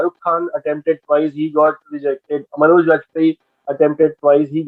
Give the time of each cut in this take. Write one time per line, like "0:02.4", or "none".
none